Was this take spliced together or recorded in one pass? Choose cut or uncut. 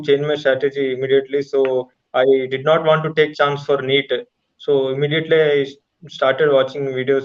uncut